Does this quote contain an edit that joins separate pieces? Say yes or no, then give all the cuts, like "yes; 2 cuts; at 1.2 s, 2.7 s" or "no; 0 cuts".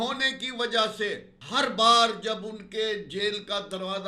yes; 1 cut; at 1.3 s